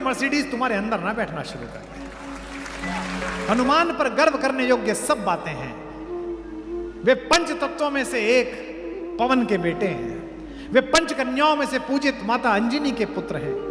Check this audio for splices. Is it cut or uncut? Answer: cut